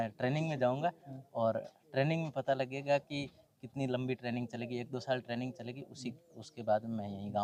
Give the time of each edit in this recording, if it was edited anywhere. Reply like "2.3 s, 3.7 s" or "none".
none

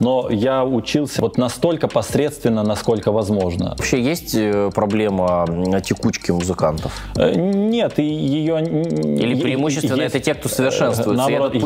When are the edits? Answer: 1.2 s, 3.8 s

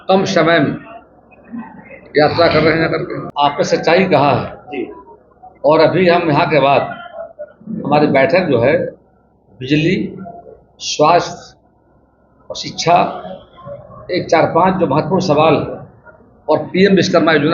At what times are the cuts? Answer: 3.2 s

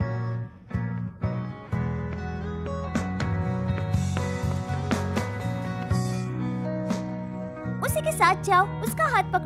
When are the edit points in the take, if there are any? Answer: none

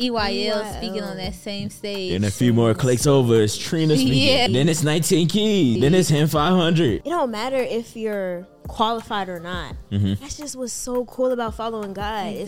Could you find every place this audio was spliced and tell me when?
4.4 s, 5.8 s, 7.0 s

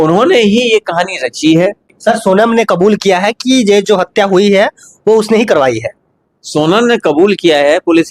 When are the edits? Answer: 1.9 s

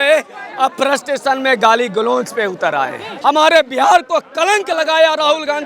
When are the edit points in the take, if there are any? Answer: 3.0 s

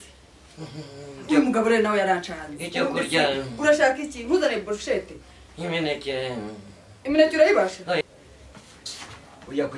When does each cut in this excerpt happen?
8.0 s

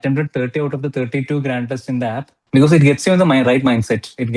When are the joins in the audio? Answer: 2.3 s

